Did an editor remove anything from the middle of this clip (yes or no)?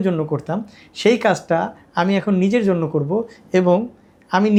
no